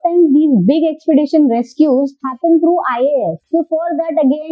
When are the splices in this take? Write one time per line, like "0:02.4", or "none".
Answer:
0:02.2
0:03.4